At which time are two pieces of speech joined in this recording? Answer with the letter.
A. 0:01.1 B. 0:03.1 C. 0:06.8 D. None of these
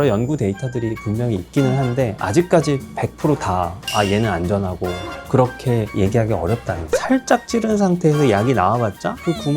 C